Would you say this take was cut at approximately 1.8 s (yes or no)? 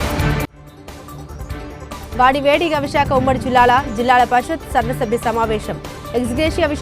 yes